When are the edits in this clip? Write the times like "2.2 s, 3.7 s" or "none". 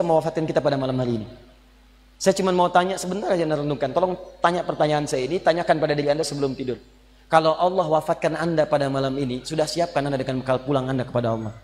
none